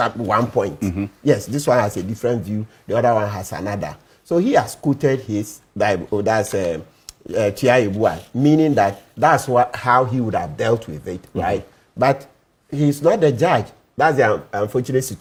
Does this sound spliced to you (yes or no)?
no